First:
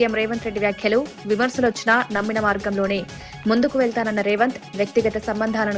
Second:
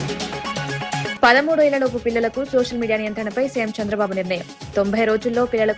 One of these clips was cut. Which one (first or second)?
second